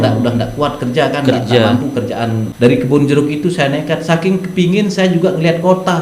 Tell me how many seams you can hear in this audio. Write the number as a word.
one